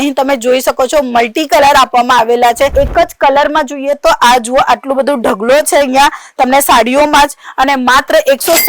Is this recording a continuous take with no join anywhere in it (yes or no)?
no